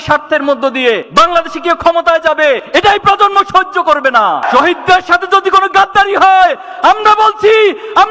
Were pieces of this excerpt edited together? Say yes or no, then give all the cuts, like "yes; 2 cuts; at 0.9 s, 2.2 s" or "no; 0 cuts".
yes; 1 cut; at 4.4 s